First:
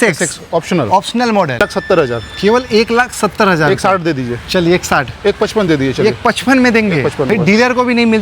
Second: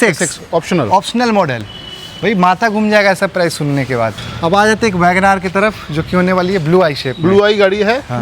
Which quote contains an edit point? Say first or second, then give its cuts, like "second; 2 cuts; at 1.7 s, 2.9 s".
first; 2 cuts; at 1.6 s, 7.2 s